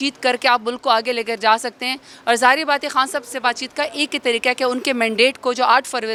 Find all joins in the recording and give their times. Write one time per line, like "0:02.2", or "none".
none